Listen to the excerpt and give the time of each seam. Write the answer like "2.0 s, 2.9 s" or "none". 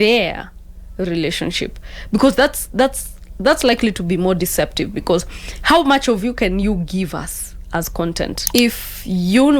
8.4 s